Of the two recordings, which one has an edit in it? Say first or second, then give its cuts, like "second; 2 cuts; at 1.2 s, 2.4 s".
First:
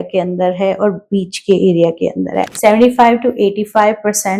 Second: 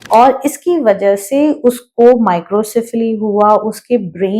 first; 1 cut; at 2.4 s